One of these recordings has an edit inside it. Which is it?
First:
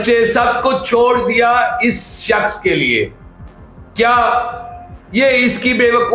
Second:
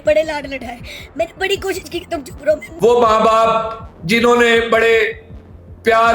second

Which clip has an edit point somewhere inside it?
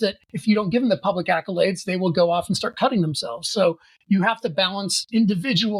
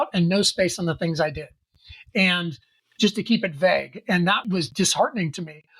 second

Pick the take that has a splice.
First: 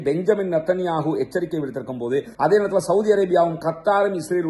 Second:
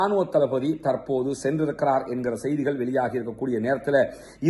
first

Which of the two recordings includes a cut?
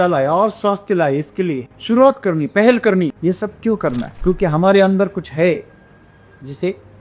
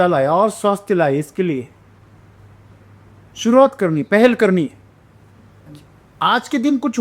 first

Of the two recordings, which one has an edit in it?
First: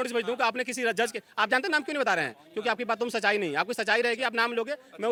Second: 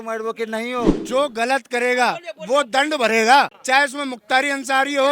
second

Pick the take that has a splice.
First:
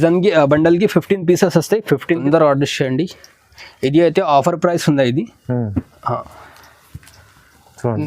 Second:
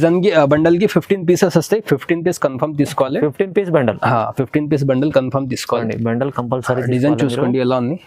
first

